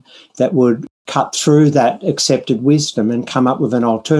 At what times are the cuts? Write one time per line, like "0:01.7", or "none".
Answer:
0:01.0

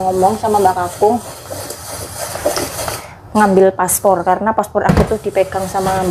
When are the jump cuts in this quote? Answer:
none

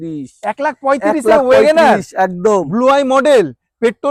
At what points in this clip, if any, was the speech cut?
none

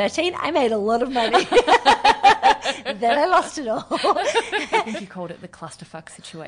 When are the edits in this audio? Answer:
0:05.0

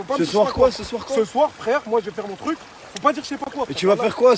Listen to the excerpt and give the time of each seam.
0:03.5

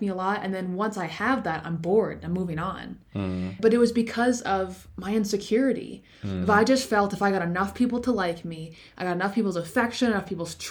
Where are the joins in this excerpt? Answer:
0:03.6

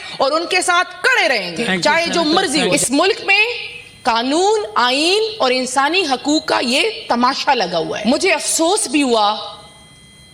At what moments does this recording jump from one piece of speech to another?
0:02.7
0:08.0

